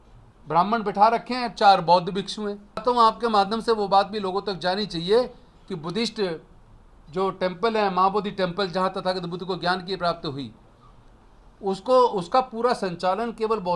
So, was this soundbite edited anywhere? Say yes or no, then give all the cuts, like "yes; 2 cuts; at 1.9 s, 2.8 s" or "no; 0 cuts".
yes; 1 cut; at 2.8 s